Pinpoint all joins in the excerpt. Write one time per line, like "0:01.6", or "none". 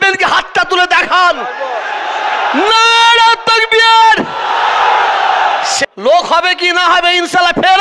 0:05.7